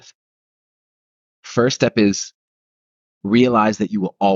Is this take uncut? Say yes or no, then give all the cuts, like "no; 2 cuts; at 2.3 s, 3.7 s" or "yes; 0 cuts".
yes; 0 cuts